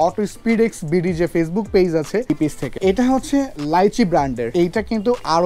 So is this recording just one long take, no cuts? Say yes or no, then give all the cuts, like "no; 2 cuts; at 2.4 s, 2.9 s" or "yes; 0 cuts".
no; 2 cuts; at 2.4 s, 4.4 s